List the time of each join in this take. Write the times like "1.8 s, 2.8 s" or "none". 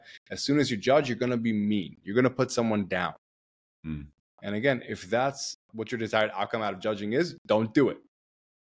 5.5 s